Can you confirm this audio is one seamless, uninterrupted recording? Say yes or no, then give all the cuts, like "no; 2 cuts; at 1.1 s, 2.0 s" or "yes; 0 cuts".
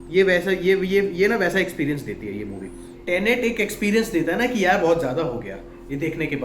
no; 1 cut; at 2.9 s